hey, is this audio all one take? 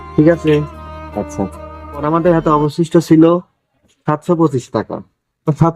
no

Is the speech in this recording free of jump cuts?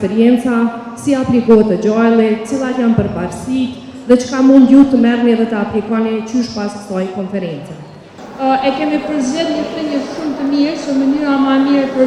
no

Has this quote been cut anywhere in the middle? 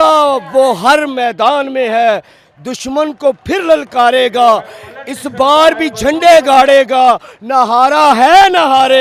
no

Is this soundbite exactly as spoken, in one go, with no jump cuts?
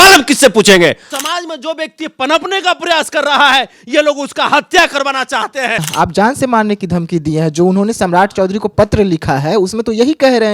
no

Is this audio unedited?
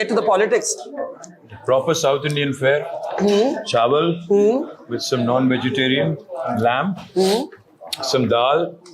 yes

